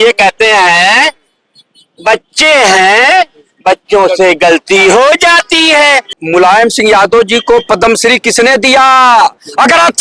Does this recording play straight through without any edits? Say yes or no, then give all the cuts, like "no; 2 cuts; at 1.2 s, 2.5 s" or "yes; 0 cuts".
no; 1 cut; at 6.1 s